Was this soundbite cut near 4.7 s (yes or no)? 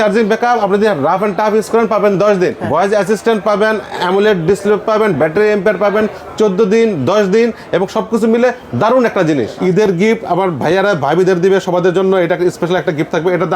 no